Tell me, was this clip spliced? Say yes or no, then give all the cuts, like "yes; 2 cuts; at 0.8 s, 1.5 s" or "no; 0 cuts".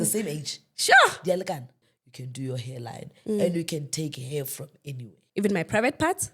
yes; 2 cuts; at 1.8 s, 5.1 s